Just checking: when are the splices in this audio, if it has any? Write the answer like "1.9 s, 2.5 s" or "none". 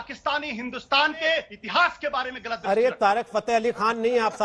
1.6 s